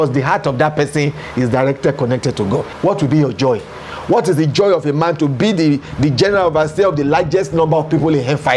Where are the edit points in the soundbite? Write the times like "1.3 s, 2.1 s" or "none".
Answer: 2.7 s